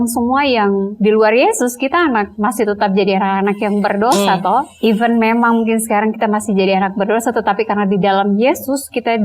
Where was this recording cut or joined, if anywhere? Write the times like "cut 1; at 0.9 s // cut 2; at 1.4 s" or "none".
cut 1; at 0.9 s // cut 2; at 2.3 s // cut 3; at 4.7 s